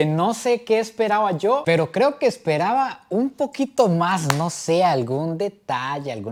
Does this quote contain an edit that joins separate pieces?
no; 0 cuts

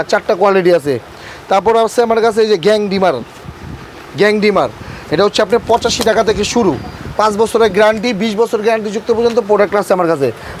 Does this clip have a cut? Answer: no; 0 cuts

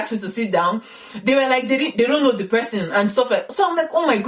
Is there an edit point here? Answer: no; 0 cuts

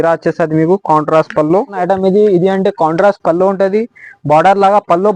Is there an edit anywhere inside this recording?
yes; 1 cut; at 1.8 s

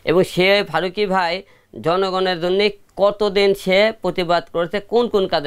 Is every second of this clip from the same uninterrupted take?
yes; 0 cuts

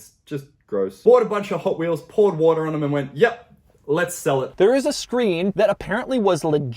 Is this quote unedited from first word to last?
no; 2 cuts; at 0.9 s, 4.5 s

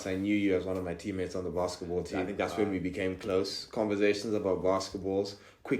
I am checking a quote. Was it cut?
yes; 1 cut; at 2.3 s

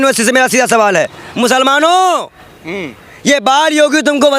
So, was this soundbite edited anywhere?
yes; 1 cut; at 1.2 s

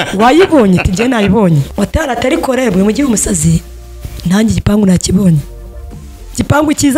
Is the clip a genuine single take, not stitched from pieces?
no; 1 cut; at 1.7 s

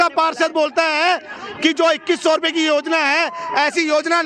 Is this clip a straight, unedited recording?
yes; 0 cuts

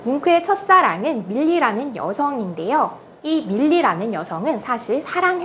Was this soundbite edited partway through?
yes; 1 cut; at 3.1 s

